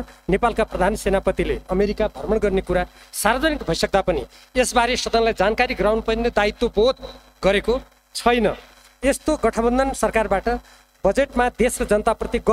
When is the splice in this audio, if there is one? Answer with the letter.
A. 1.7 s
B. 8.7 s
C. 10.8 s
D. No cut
D